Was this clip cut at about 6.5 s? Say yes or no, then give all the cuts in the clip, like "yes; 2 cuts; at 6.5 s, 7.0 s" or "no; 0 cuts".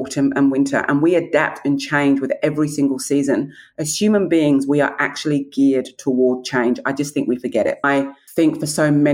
no; 1 cut; at 7.8 s